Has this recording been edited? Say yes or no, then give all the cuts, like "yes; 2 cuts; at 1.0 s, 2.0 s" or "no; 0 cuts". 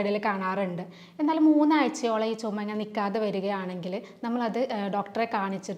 no; 0 cuts